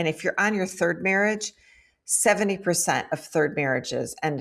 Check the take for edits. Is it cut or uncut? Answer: uncut